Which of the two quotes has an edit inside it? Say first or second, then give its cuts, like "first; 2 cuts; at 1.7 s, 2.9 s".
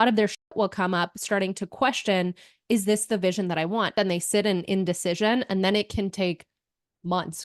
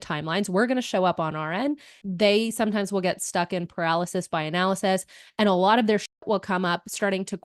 first; 1 cut; at 3.9 s